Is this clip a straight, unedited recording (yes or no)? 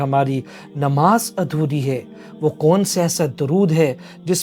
yes